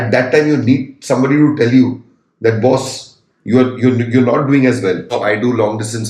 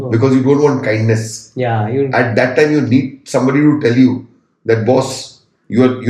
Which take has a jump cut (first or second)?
first